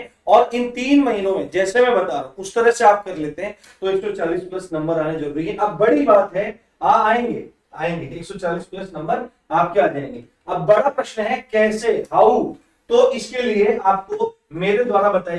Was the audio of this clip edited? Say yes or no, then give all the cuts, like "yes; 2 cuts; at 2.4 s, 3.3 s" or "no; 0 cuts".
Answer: no; 0 cuts